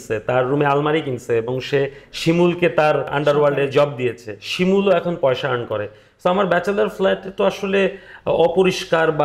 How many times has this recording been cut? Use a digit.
1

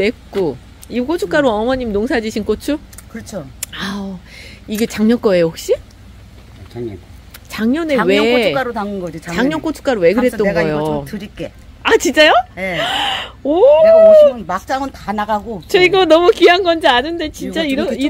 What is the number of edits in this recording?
0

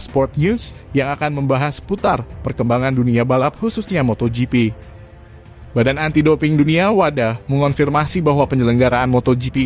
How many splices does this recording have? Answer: 1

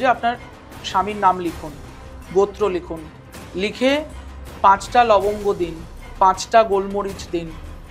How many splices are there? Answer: 0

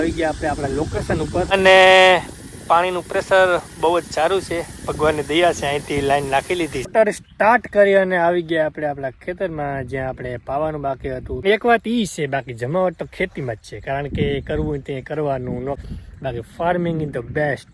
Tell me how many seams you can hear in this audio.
4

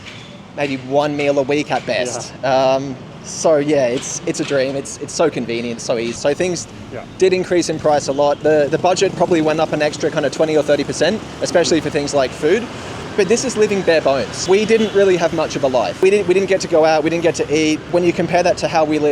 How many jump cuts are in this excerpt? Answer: 5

